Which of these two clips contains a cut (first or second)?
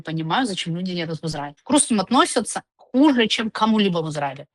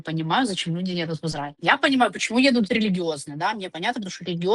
first